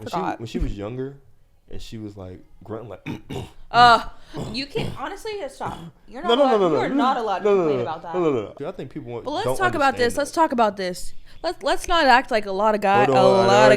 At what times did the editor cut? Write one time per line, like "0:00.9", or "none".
0:08.5

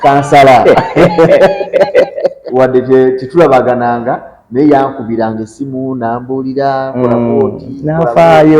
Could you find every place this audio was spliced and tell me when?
0:02.4

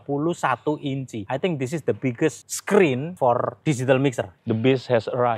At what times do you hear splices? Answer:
0:01.1
0:02.4
0:03.2
0:04.3

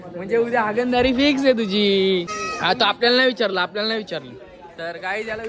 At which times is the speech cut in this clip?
0:02.4

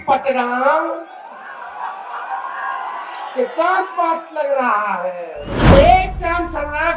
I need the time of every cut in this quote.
0:05.7

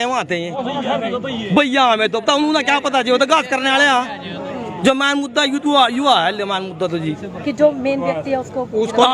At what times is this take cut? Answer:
none

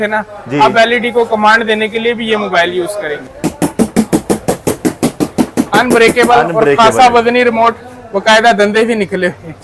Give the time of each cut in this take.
0:03.2

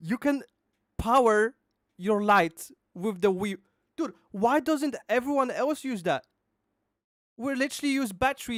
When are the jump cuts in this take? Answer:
none

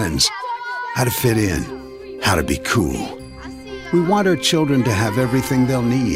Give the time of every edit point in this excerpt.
none

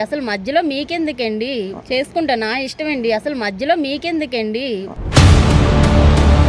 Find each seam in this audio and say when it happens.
none

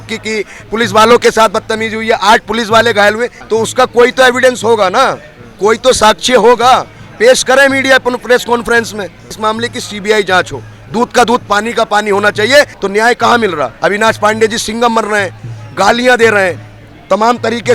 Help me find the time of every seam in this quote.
0:03.4
0:09.4
0:12.8

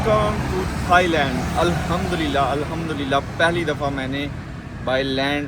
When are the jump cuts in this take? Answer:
none

